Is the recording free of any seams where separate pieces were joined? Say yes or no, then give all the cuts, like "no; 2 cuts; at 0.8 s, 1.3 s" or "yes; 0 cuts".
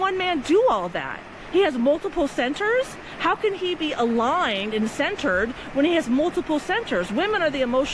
yes; 0 cuts